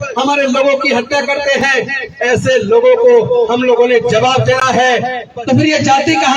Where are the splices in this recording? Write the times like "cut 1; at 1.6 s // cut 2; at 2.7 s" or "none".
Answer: cut 1; at 5.2 s